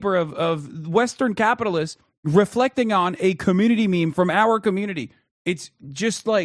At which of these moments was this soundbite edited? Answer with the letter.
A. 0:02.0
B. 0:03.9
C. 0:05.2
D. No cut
C